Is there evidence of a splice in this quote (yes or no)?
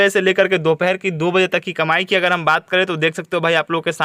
no